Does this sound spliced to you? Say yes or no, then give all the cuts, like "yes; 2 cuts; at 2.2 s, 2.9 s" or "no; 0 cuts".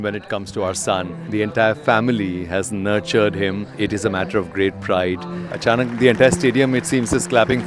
yes; 3 cuts; at 1.2 s, 3.7 s, 5.4 s